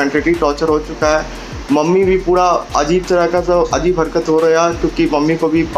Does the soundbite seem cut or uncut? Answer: uncut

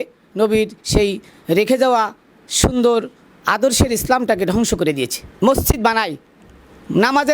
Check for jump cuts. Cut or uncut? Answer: cut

